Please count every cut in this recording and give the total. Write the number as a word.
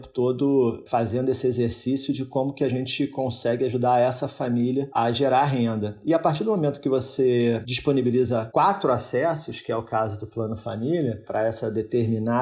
zero